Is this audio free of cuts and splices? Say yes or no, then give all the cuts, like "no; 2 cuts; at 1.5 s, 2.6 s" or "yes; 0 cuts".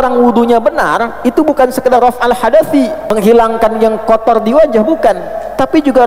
no; 1 cut; at 3.1 s